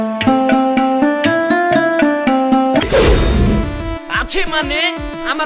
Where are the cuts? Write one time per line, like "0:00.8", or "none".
0:02.8